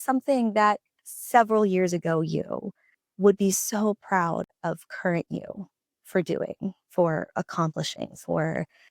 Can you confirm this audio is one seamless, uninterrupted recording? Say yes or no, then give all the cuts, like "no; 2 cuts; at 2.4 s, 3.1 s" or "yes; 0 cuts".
no; 1 cut; at 1.0 s